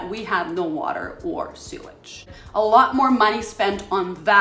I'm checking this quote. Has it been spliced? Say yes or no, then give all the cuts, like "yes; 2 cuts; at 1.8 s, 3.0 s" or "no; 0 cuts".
yes; 1 cut; at 2.4 s